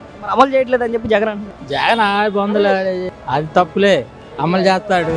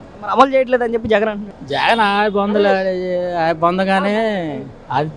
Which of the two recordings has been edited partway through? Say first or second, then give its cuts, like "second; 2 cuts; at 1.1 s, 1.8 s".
first; 2 cuts; at 3.1 s, 4.2 s